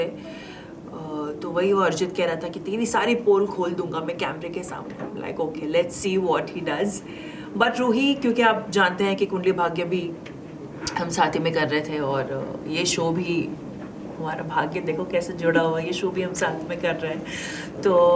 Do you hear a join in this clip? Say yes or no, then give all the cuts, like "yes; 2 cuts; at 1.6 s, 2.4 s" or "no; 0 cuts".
no; 0 cuts